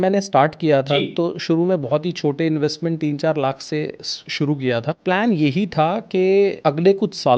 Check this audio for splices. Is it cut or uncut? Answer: cut